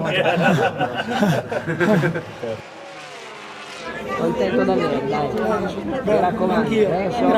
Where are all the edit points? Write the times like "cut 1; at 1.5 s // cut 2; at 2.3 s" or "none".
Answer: none